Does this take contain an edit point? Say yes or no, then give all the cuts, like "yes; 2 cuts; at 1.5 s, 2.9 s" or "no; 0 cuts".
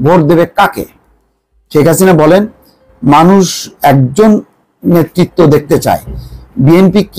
no; 0 cuts